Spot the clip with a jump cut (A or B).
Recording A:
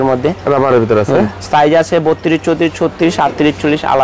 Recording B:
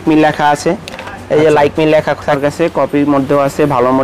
B